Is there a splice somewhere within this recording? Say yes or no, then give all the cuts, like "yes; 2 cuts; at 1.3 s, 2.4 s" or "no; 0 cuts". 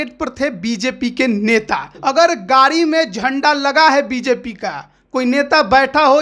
yes; 1 cut; at 1.9 s